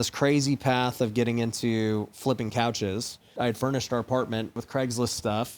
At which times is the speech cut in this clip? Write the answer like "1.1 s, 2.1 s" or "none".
3.3 s, 4.6 s